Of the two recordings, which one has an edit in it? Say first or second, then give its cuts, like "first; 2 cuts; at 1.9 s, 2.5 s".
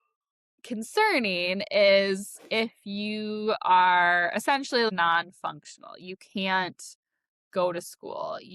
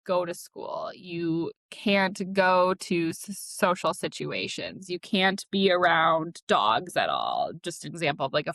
first; 1 cut; at 4.9 s